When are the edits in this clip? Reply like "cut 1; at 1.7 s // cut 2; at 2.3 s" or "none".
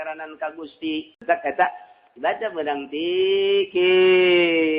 cut 1; at 1.2 s